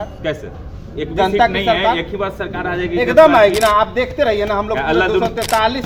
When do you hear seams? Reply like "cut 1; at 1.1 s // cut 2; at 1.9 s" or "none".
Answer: none